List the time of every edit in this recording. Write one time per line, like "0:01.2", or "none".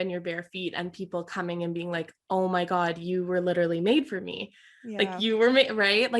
none